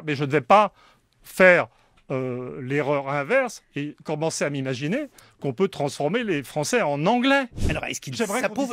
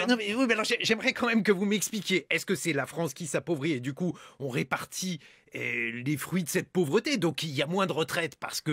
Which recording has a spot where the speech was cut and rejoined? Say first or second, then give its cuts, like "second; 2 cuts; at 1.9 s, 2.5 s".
first; 1 cut; at 7.6 s